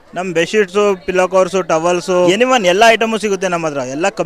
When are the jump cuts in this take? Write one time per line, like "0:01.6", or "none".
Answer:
0:02.3

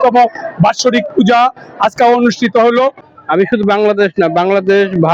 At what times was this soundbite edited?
0:03.1

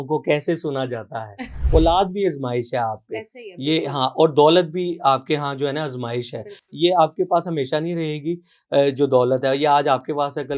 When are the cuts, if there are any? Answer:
0:01.5

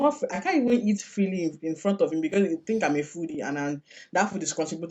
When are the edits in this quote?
none

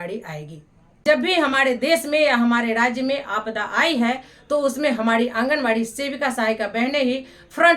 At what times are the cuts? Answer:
0:01.0

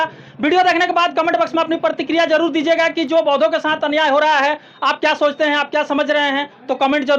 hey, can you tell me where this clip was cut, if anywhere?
none

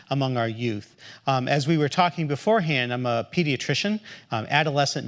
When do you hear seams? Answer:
none

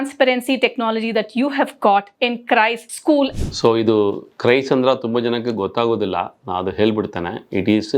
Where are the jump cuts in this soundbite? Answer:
0:02.6

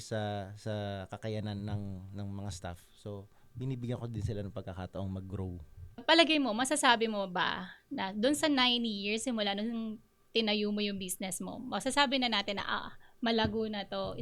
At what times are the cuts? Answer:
0:06.0

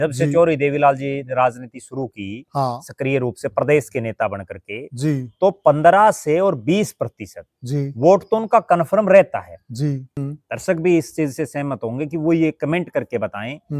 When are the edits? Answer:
0:10.1

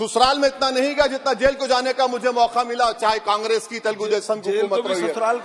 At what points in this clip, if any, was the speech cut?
none

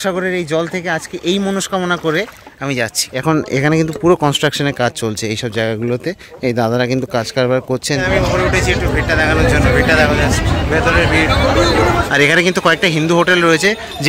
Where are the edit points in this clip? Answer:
0:03.0
0:08.0
0:12.0

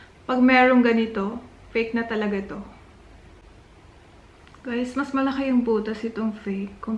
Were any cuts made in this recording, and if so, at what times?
0:03.4

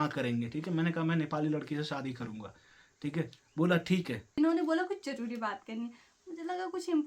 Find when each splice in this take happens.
0:04.3

